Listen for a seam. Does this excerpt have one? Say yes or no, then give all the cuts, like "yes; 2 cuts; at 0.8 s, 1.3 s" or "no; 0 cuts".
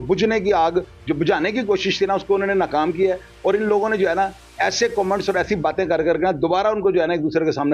no; 0 cuts